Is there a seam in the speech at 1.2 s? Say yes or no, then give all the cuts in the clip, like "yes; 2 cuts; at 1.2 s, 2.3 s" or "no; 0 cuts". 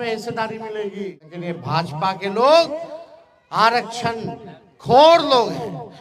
yes; 1 cut; at 1.2 s